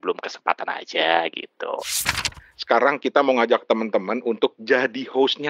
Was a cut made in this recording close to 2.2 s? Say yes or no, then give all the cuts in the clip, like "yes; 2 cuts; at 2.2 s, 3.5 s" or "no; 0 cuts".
yes; 1 cut; at 2.2 s